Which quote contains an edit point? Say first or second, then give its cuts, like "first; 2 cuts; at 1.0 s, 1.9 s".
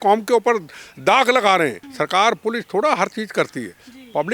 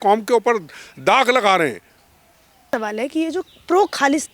first; 1 cut; at 1.8 s